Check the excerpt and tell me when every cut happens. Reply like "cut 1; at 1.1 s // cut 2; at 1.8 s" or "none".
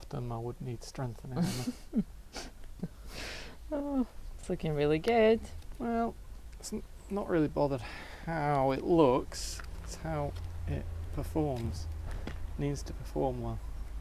none